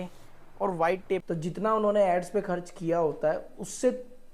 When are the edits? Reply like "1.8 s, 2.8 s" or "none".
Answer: 1.2 s